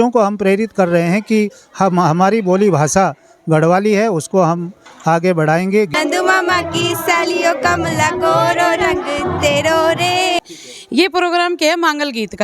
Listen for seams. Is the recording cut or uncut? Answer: cut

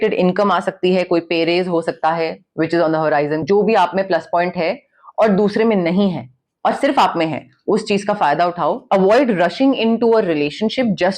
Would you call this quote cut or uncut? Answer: cut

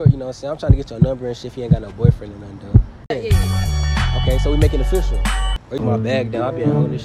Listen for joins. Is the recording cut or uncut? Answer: cut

